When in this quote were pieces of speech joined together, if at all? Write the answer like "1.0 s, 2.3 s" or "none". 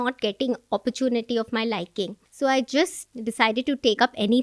2.2 s, 3.0 s